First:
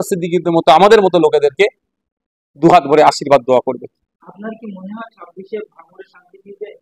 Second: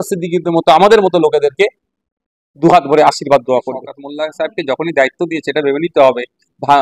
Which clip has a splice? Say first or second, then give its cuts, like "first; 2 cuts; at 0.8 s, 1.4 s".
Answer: second; 1 cut; at 4.0 s